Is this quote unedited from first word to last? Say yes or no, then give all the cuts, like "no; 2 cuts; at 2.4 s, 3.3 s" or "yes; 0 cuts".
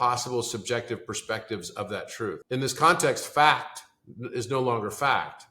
no; 1 cut; at 2.4 s